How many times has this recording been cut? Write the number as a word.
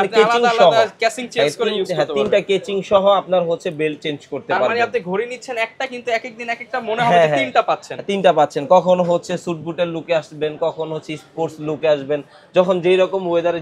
zero